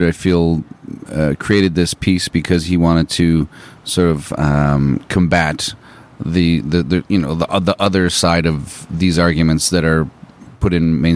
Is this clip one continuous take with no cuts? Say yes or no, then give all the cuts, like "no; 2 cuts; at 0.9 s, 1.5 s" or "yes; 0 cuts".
yes; 0 cuts